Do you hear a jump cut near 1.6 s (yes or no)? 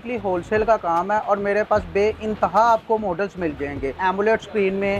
no